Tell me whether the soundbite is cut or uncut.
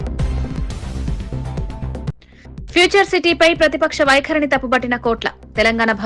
uncut